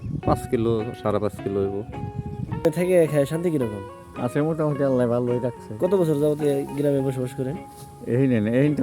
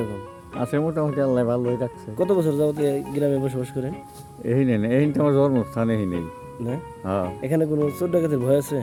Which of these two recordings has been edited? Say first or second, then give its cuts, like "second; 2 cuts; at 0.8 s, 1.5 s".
first; 1 cut; at 2.6 s